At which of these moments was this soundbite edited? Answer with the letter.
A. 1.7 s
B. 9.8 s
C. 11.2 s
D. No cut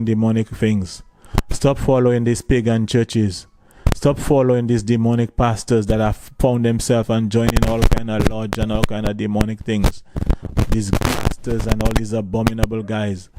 C